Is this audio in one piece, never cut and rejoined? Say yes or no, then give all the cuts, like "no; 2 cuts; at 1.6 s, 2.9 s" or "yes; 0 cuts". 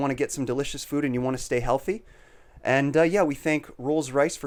yes; 0 cuts